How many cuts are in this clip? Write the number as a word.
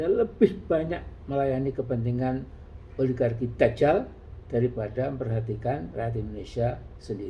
zero